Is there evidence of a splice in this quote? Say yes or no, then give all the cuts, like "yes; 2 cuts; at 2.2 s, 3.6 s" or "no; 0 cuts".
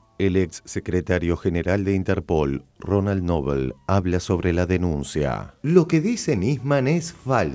no; 0 cuts